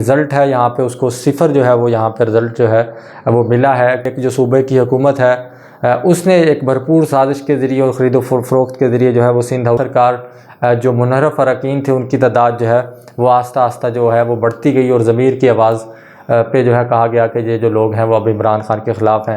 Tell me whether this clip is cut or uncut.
cut